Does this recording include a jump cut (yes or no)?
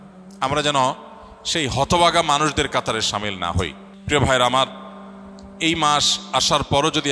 yes